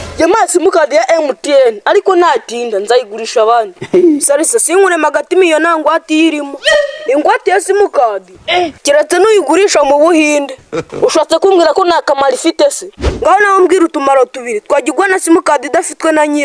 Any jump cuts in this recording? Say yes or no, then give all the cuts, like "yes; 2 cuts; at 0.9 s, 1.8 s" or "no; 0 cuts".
no; 0 cuts